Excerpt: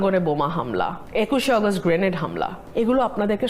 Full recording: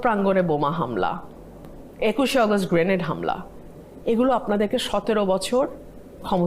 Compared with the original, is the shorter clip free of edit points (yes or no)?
no